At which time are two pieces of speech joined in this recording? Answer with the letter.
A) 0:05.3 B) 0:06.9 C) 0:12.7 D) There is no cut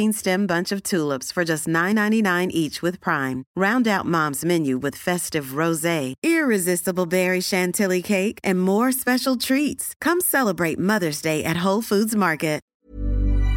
C